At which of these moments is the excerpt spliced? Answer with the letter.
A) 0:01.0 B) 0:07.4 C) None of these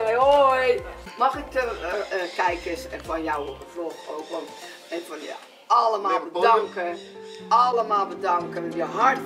A